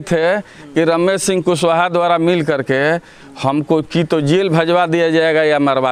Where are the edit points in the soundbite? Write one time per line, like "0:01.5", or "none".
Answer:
none